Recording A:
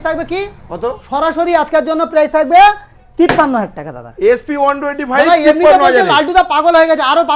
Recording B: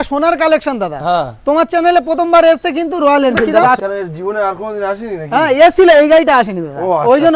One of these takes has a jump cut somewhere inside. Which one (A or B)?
B